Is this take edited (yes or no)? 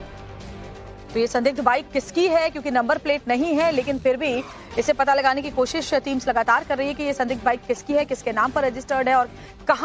yes